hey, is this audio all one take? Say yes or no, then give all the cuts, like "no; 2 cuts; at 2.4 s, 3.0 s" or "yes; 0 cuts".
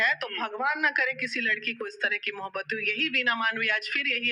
yes; 0 cuts